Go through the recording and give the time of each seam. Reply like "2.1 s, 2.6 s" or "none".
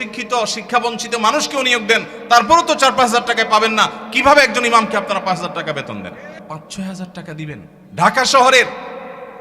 6.4 s, 7.8 s